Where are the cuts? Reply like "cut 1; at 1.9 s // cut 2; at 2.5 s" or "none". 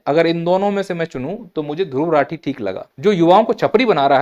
cut 1; at 2.9 s